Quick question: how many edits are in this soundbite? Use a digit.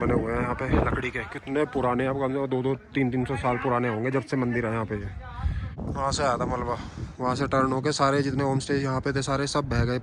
1